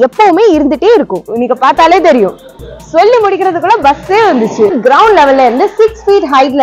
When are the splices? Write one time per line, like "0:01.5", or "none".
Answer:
0:04.7